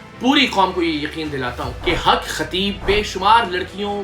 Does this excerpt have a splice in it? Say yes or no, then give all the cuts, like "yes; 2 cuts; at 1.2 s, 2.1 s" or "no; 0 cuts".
yes; 2 cuts; at 1.7 s, 2.8 s